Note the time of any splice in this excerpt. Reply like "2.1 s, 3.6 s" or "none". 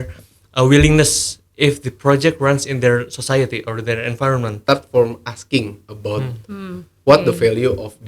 4.5 s